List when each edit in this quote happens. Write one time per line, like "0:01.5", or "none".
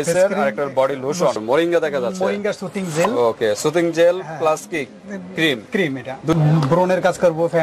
0:01.4
0:06.3